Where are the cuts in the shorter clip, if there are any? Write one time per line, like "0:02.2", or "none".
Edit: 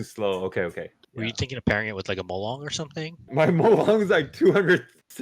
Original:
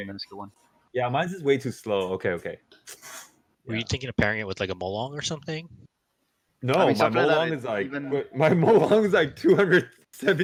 0:01.0
0:03.3